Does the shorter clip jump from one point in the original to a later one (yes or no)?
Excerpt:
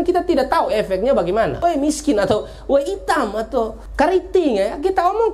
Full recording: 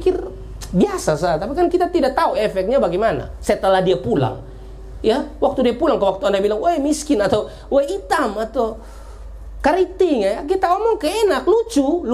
yes